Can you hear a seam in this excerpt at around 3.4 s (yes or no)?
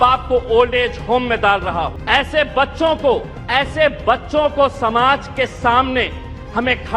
yes